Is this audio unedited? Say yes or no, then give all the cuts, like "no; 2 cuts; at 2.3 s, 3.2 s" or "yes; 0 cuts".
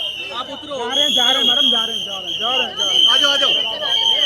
yes; 0 cuts